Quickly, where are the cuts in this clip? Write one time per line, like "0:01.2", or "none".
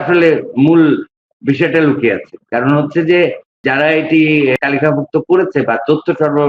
0:03.6
0:04.6